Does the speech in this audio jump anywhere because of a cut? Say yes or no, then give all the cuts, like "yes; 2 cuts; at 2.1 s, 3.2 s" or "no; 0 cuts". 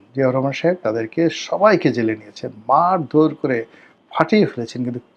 no; 0 cuts